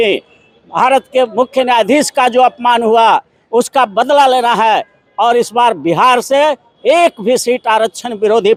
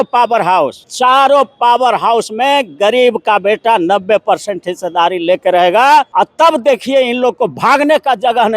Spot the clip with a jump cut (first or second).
second